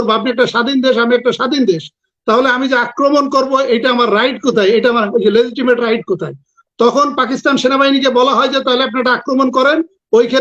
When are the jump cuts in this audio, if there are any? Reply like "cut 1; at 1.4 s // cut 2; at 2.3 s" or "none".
none